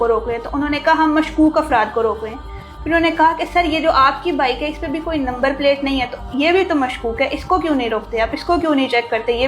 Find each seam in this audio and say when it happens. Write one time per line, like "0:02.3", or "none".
none